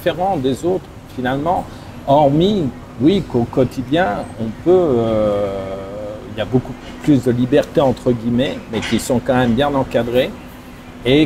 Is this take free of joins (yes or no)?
yes